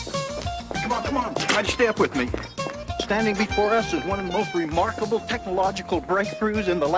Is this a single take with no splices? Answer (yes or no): no